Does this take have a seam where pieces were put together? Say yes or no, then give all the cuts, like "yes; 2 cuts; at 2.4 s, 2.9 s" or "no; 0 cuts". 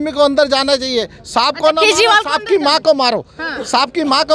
no; 0 cuts